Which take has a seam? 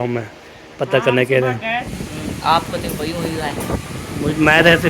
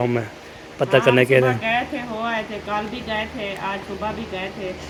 first; 1 cut; at 1.9 s

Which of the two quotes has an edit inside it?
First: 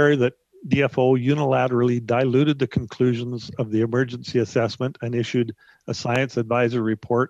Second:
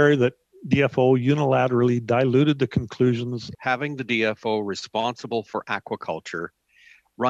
second; 1 cut; at 3.5 s

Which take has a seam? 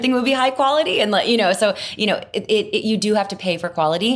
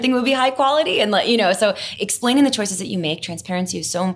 second; 1 cut; at 1.9 s

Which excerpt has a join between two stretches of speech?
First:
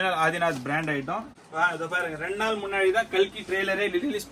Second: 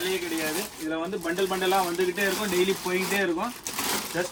first; 1 cut; at 1.3 s

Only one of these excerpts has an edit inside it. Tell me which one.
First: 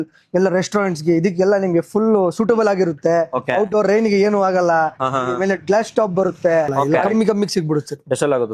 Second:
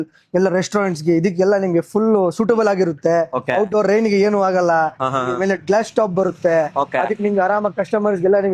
first; 1 cut; at 6.9 s

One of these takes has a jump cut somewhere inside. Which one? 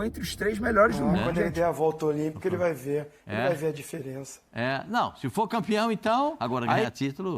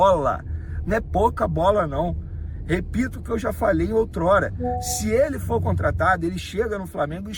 first; 2 cuts; at 1.4 s, 6.5 s

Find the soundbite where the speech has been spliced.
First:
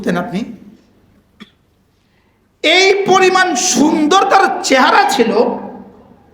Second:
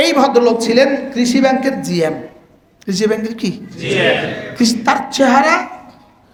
first; 1 cut; at 1.1 s

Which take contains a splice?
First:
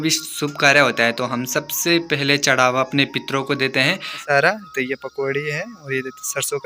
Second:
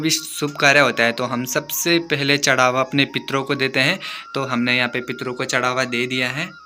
first; 1 cut; at 4.2 s

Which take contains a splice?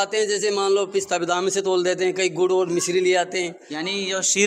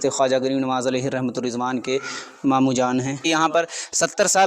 second; 1 cut; at 3.2 s

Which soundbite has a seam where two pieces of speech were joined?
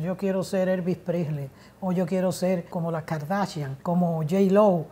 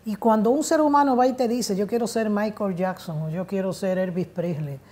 first; 2 cuts; at 2.7 s, 3.7 s

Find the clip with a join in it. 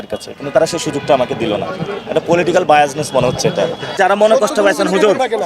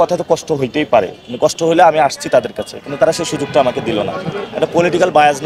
first; 1 cut; at 3.9 s

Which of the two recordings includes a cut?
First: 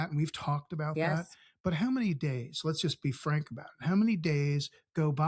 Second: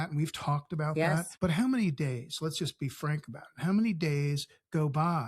second; 1 cut; at 1.3 s

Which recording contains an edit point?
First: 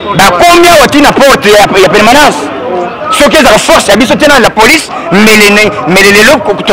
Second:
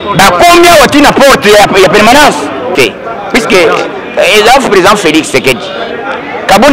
second; 1 cut; at 2.7 s

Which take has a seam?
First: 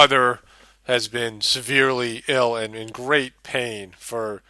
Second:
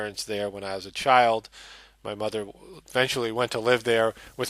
first; 1 cut; at 1.1 s

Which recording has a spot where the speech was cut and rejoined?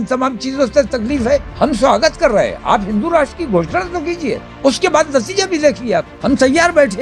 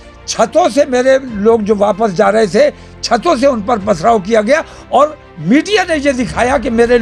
first; 3 cuts; at 1.5 s, 4.5 s, 6.1 s

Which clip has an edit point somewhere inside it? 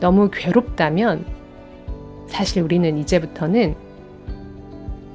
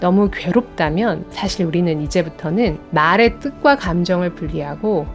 second; 2 cuts; at 1.3 s, 2.8 s

